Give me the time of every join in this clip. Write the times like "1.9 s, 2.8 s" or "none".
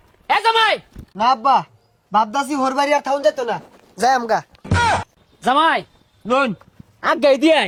none